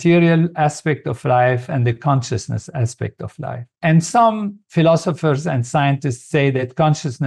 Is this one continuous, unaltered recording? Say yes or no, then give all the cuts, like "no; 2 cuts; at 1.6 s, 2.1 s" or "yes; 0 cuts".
yes; 0 cuts